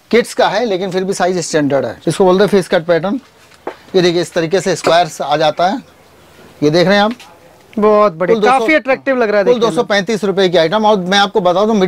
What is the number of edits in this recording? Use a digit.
1